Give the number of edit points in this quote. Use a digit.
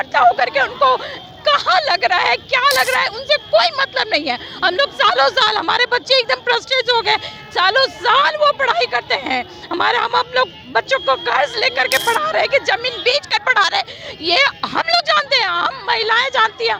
0